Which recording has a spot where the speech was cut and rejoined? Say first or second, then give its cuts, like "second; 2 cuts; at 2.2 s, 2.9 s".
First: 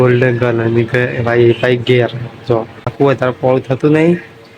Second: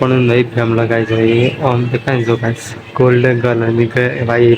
first; 1 cut; at 2.9 s